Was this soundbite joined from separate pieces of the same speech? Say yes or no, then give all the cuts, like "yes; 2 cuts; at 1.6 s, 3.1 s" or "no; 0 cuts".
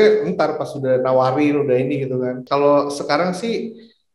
yes; 1 cut; at 2.4 s